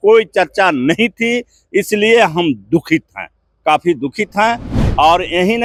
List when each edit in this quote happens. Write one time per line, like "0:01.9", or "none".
none